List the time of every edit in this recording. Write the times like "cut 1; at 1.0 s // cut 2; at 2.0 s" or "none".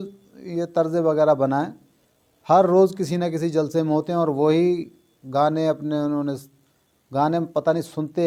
none